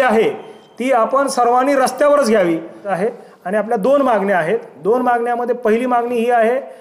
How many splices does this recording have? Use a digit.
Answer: 1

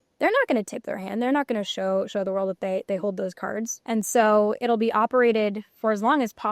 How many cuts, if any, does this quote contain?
1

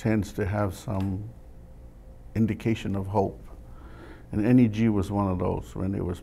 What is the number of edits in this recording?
0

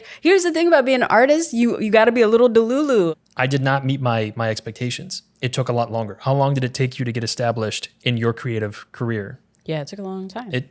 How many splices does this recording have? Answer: 1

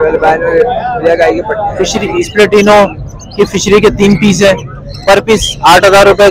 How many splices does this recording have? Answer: 1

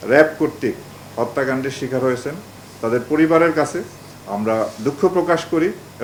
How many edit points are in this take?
0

